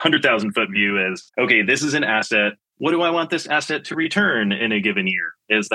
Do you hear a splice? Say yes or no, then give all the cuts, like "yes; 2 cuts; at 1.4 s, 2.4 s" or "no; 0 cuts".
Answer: yes; 1 cut; at 4.6 s